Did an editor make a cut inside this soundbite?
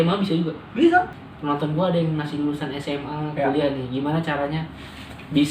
yes; 1 cut; at 1.2 s

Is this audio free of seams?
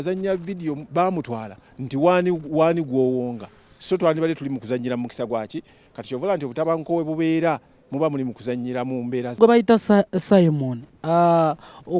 no; 1 cut; at 9.4 s

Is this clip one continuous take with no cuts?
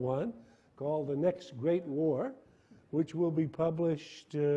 yes; 0 cuts

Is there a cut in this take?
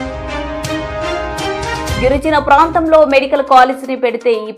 no; 0 cuts

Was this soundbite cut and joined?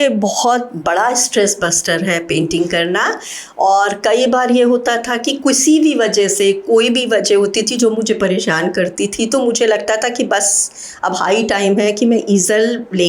no; 0 cuts

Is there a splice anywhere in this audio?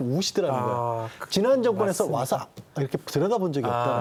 no; 0 cuts

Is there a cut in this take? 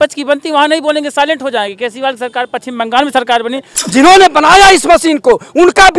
yes; 1 cut; at 3.8 s

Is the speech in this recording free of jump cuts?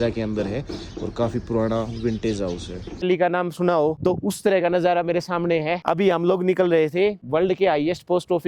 no; 1 cut; at 3.0 s

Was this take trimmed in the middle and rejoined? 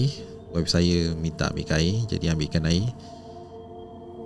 no; 0 cuts

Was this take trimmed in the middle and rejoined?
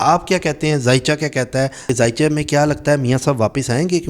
yes; 1 cut; at 1.8 s

